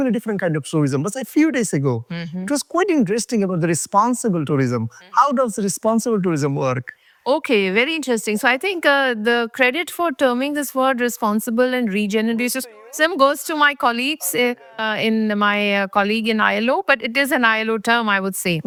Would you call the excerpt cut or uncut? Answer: uncut